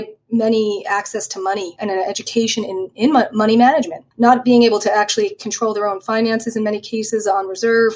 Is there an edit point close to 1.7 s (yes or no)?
yes